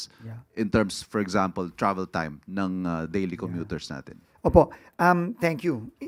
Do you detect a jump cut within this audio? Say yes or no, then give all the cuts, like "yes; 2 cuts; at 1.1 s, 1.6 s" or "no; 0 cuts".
no; 0 cuts